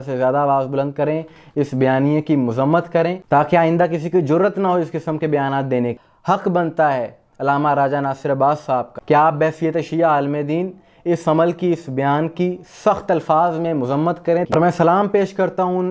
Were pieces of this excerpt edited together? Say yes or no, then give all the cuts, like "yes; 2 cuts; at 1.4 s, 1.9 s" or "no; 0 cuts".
yes; 2 cuts; at 6.0 s, 14.5 s